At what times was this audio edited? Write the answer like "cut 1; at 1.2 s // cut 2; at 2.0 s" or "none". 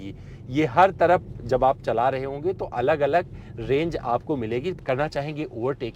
cut 1; at 4.8 s